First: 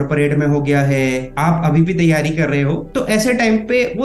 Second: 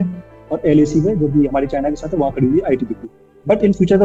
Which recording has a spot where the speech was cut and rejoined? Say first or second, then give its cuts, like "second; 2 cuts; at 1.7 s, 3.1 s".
first; 2 cuts; at 1.3 s, 2.8 s